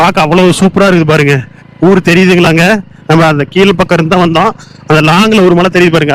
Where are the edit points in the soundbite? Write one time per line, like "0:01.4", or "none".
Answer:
none